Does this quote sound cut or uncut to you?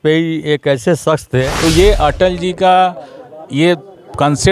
cut